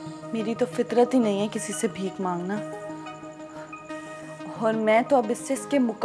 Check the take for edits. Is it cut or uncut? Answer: uncut